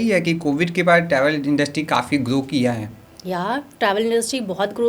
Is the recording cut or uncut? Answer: uncut